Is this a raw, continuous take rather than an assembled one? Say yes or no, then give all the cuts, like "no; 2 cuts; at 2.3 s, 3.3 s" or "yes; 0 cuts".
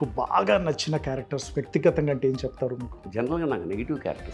no; 1 cut; at 3.0 s